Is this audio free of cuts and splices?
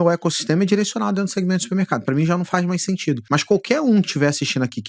no; 1 cut; at 3.2 s

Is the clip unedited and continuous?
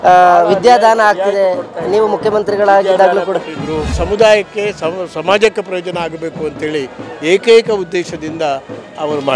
no; 1 cut; at 4.0 s

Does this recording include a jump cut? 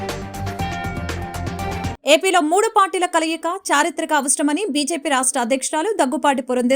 yes; 1 cut; at 1.6 s

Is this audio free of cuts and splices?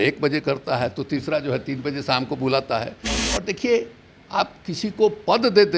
no; 1 cut; at 3.1 s

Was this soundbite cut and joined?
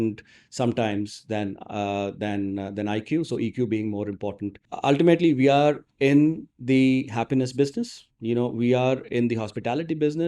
yes; 1 cut; at 4.7 s

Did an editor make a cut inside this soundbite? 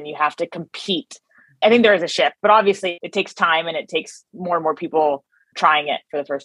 yes; 3 cuts; at 1.6 s, 3.0 s, 5.5 s

